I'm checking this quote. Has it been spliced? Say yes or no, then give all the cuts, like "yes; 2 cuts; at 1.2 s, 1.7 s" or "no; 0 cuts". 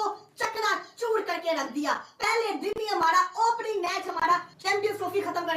yes; 1 cut; at 4.5 s